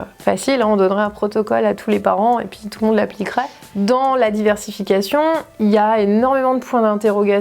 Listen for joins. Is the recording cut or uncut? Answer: cut